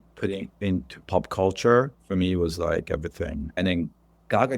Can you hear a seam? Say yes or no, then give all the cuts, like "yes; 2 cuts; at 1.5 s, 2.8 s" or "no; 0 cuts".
yes; 1 cut; at 3.6 s